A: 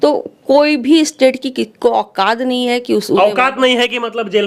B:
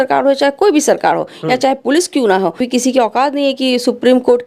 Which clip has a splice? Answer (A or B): B